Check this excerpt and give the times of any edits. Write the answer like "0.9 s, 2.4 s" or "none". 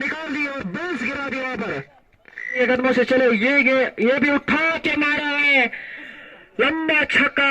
2.6 s